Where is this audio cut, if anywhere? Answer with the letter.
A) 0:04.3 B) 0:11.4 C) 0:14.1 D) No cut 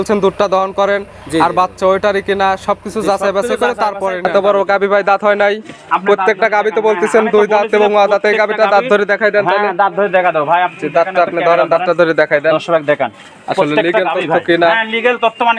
A